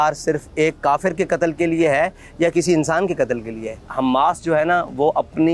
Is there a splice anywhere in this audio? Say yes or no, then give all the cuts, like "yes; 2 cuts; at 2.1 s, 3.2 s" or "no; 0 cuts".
yes; 1 cut; at 3.8 s